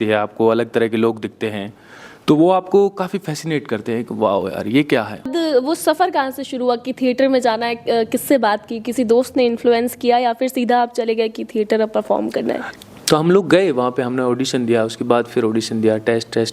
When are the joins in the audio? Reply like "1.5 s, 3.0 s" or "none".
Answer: 5.3 s, 12.7 s

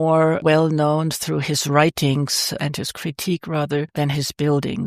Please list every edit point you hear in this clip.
none

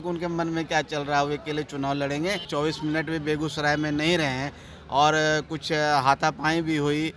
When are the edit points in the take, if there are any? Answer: 2.5 s

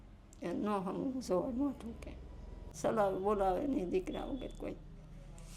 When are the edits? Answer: 2.7 s

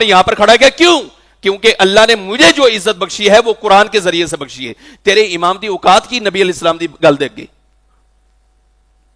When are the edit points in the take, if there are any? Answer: none

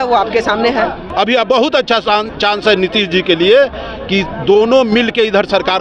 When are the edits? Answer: 1.0 s

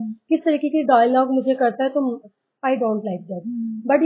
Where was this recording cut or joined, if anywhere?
none

